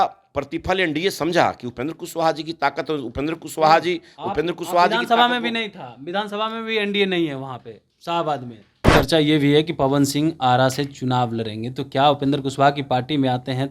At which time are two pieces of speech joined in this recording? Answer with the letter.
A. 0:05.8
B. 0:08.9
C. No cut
B